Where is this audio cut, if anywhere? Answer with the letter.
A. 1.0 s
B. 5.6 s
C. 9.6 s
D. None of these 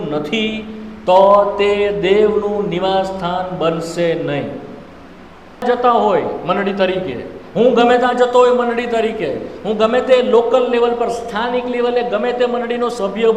B